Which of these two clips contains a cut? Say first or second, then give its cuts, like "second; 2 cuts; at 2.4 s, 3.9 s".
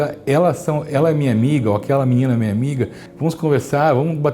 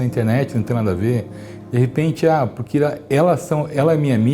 first; 1 cut; at 3.0 s